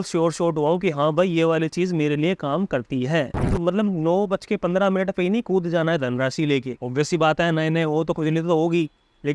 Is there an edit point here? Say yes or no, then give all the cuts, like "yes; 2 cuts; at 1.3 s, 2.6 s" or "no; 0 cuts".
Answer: yes; 2 cuts; at 3.6 s, 6.8 s